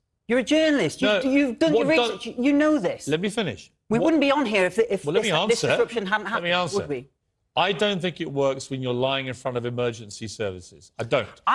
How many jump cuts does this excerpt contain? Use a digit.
0